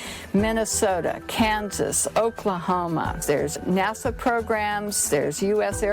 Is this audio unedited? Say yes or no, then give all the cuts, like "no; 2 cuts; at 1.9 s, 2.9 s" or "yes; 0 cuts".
no; 1 cut; at 3.6 s